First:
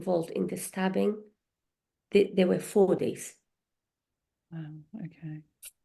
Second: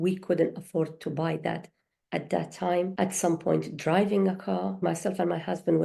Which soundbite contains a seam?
second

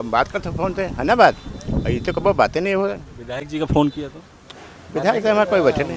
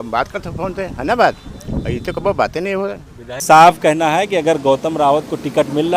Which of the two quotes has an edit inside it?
second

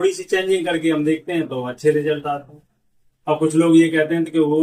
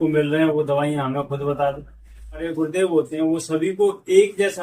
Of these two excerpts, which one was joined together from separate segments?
second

